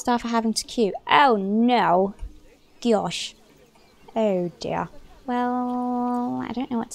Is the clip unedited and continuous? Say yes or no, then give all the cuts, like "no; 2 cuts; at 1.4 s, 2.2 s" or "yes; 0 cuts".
yes; 0 cuts